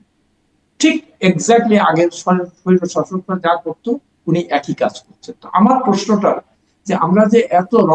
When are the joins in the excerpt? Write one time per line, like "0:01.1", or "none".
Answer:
none